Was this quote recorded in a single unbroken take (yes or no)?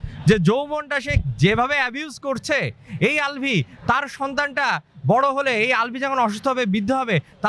yes